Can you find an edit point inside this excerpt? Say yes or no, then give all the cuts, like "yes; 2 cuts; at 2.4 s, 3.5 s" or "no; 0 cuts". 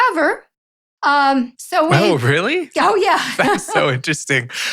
yes; 1 cut; at 3.8 s